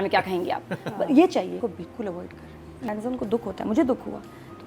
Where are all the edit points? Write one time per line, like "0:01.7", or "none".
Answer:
0:01.6
0:02.9